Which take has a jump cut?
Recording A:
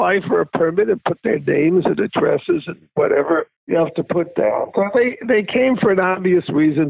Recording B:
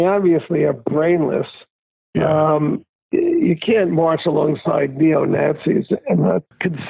A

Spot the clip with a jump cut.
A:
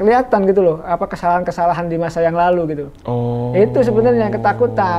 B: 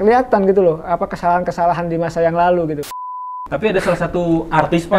B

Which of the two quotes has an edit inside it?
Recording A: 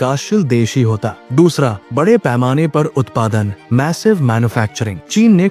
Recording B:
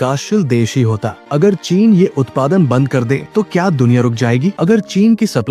B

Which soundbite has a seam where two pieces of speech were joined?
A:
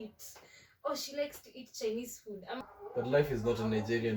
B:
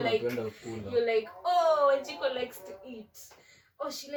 A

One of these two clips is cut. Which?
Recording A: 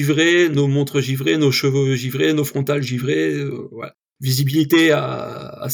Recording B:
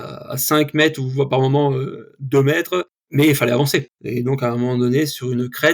B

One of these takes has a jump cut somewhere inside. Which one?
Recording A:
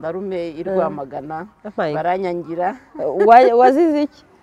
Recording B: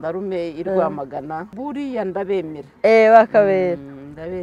B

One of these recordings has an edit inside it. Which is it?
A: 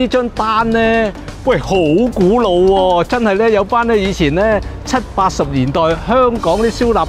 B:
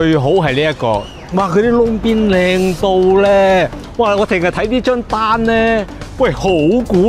B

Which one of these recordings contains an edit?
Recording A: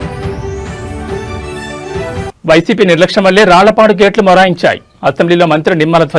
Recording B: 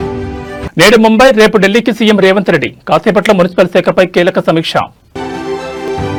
A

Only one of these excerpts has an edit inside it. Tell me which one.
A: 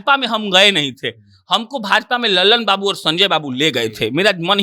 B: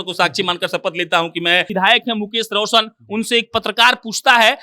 B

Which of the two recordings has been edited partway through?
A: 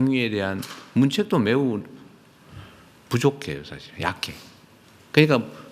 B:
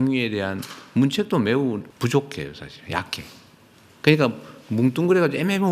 B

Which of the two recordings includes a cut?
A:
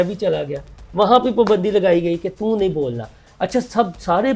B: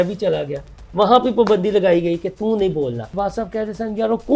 B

